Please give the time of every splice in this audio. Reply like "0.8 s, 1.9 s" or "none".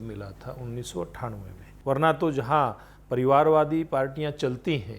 1.7 s